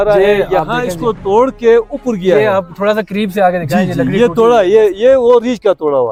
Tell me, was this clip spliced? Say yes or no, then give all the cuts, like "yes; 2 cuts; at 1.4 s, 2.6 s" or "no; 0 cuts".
no; 0 cuts